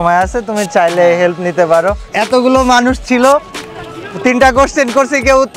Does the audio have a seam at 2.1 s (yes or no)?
yes